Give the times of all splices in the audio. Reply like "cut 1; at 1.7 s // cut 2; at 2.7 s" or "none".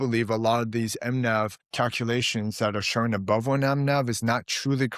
cut 1; at 1.6 s